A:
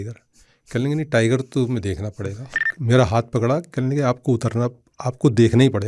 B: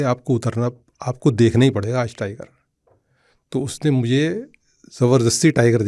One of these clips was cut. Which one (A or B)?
A